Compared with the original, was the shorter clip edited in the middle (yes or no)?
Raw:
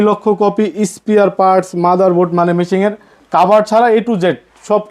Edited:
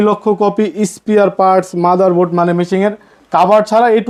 no